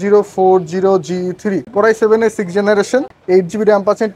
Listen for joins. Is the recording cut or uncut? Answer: cut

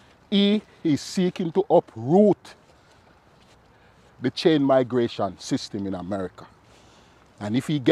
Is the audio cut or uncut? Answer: uncut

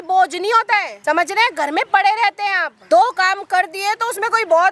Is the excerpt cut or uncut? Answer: cut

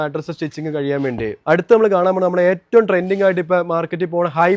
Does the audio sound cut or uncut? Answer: uncut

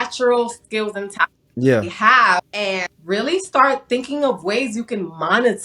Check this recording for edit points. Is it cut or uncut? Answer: uncut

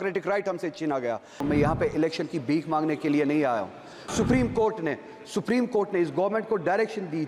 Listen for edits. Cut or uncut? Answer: cut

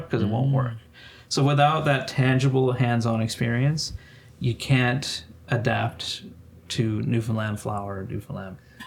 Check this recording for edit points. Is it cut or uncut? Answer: uncut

